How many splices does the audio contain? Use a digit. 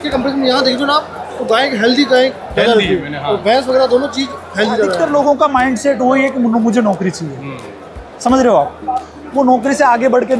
1